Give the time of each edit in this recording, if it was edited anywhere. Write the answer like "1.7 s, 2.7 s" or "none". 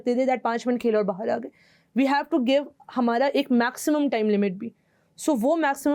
none